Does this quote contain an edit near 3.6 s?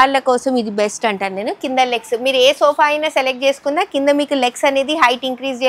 no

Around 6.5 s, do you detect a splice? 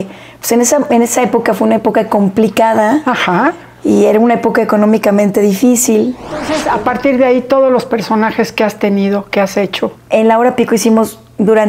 yes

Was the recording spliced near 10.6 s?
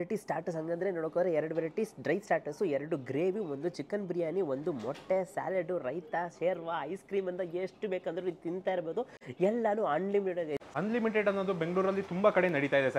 yes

